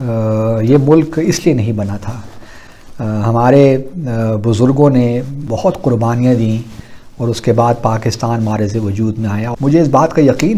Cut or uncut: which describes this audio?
cut